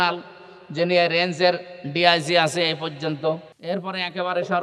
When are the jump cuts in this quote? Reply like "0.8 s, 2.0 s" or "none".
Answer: 3.5 s